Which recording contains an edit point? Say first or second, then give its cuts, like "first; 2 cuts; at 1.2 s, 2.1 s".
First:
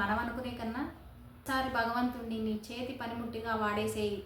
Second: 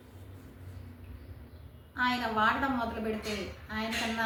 first; 1 cut; at 1.4 s